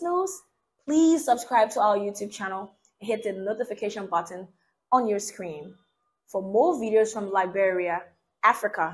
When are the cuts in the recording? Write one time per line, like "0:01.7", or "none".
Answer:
none